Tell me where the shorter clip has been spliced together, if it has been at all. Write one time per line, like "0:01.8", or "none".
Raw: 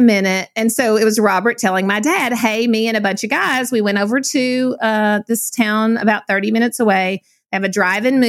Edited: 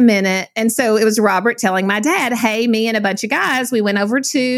none